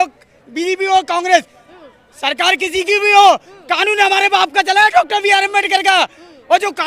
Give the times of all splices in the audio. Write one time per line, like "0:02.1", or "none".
none